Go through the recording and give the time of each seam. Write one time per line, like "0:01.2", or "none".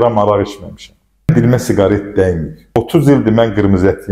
0:01.3
0:02.8